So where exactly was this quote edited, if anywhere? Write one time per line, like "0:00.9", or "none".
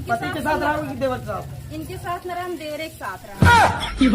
0:03.3